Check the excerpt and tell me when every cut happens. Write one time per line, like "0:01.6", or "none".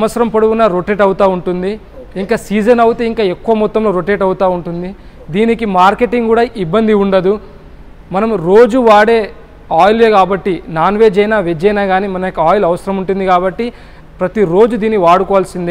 none